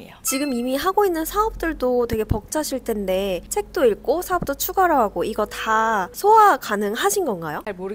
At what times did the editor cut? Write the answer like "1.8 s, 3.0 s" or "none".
none